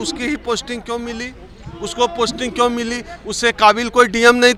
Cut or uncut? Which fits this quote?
uncut